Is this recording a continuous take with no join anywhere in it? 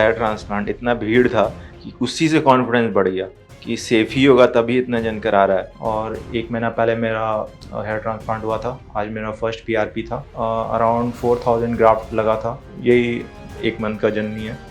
no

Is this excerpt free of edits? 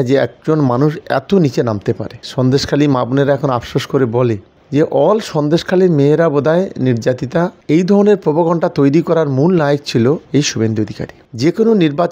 no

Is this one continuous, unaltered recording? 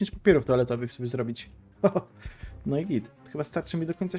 yes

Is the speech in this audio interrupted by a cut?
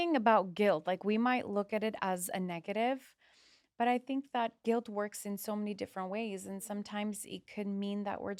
no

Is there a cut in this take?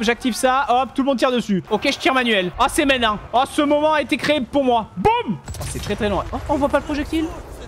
yes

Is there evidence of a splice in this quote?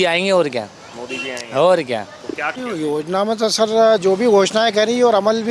yes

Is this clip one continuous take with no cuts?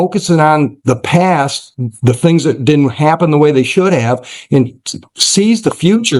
yes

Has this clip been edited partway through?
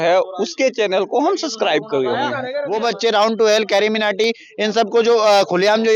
yes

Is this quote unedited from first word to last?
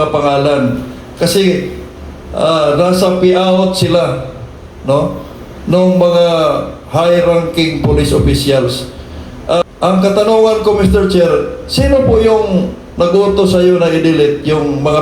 no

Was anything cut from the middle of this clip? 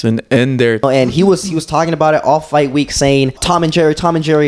yes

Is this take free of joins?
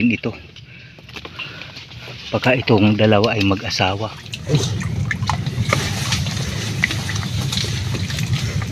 no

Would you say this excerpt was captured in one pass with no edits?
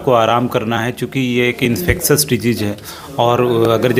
yes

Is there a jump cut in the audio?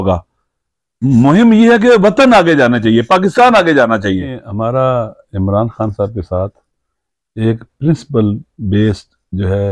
yes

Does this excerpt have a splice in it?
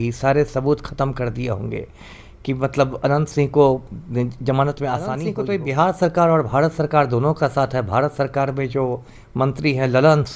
yes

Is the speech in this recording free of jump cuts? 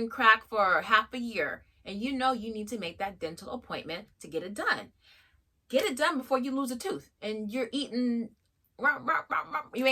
yes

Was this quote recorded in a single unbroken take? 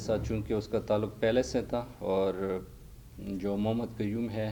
yes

